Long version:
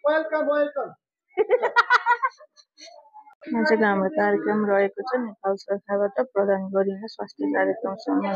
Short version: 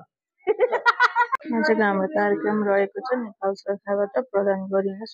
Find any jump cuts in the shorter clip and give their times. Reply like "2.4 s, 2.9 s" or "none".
1.4 s